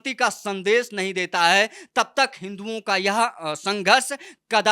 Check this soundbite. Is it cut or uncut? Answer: uncut